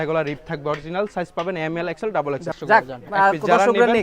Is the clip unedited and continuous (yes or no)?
no